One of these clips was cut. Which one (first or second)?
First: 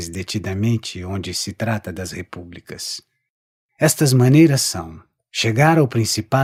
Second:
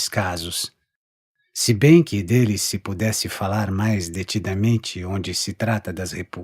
second